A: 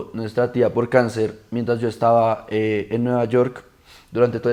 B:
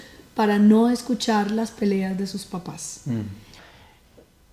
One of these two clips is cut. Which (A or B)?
B